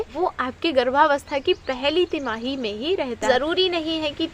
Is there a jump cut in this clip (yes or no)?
yes